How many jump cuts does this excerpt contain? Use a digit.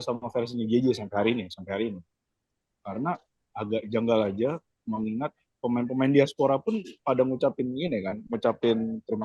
0